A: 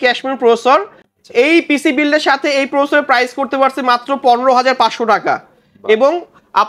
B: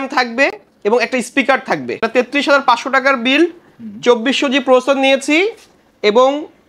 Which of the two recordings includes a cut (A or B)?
B